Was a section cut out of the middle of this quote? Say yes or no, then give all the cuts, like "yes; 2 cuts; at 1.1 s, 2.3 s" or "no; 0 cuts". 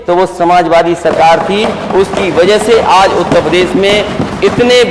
no; 0 cuts